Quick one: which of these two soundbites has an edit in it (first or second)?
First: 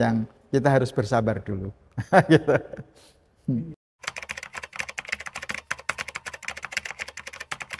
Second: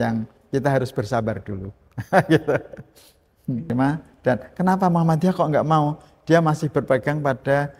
second